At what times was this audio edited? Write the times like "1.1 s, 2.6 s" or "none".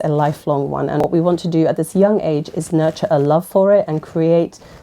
1.1 s